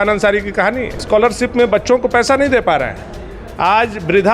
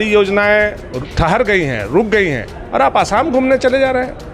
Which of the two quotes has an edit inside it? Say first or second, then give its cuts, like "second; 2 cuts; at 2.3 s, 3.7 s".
first; 1 cut; at 1.0 s